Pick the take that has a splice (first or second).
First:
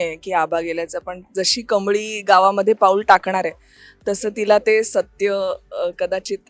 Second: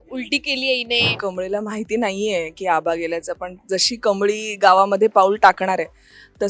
second